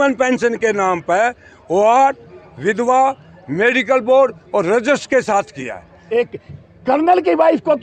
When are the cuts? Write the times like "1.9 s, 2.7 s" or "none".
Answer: 5.9 s